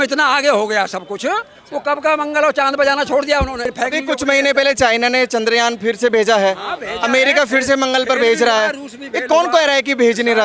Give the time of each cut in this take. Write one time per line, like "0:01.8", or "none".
0:03.7